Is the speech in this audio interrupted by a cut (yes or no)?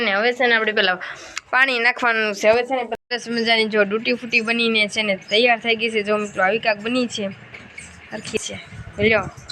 yes